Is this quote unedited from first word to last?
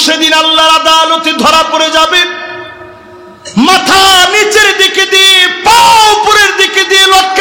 yes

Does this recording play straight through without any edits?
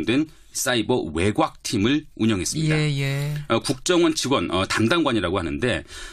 yes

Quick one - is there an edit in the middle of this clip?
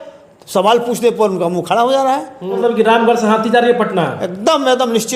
yes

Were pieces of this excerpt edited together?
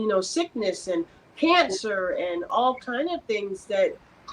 no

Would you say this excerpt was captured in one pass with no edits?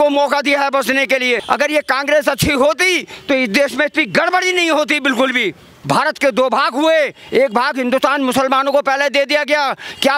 no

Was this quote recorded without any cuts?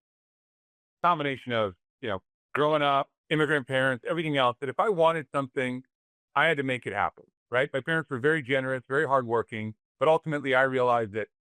no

